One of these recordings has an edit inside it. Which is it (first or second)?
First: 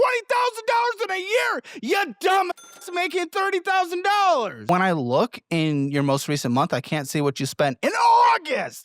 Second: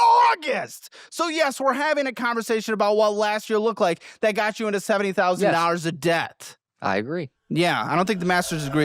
first